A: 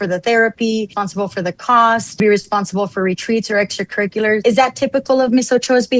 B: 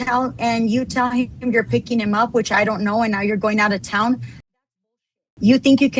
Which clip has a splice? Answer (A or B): A